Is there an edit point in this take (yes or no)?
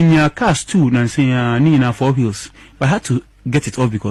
no